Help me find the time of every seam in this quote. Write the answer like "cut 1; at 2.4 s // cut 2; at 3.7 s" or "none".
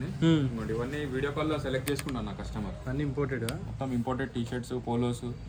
none